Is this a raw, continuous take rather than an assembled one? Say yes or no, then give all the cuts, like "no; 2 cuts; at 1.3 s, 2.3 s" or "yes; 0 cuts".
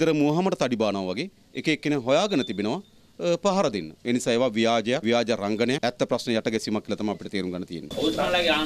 yes; 0 cuts